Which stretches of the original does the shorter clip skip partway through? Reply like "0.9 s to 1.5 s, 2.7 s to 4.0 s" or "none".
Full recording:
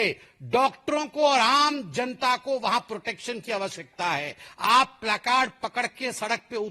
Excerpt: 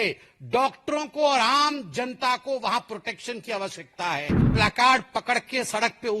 4.5 s to 5.0 s